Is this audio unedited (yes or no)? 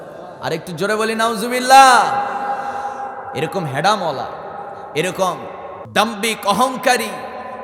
no